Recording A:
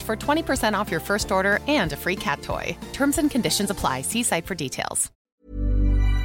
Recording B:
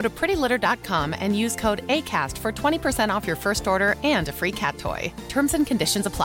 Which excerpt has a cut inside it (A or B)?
A